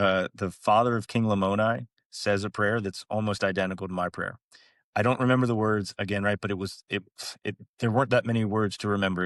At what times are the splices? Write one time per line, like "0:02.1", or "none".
none